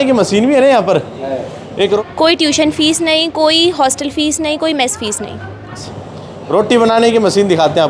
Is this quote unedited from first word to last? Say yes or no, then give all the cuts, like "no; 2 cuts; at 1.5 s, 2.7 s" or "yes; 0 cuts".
no; 2 cuts; at 2.0 s, 5.9 s